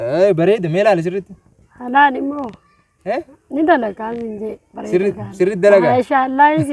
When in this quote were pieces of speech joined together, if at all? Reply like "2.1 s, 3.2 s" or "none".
none